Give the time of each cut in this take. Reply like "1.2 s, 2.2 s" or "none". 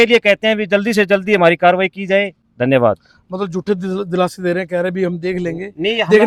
none